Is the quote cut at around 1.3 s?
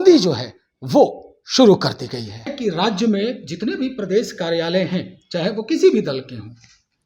no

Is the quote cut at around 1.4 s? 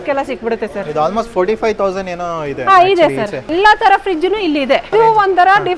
no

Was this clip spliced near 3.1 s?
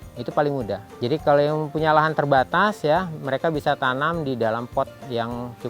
no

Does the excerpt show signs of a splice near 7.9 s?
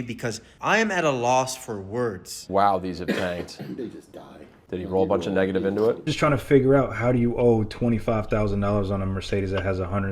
no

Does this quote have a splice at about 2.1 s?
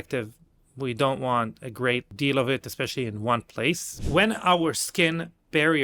yes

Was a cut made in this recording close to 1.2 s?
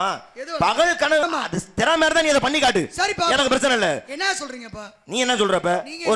yes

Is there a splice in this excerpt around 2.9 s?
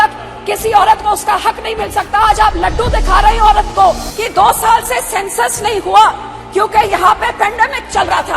no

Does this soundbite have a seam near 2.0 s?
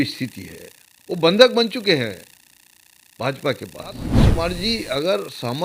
no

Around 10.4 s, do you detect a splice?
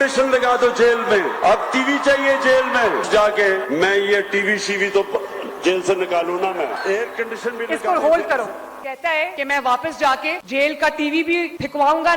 yes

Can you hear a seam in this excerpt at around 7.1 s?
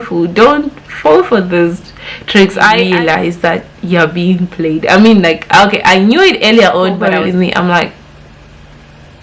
yes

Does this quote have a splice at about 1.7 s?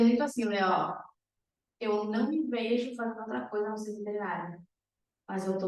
no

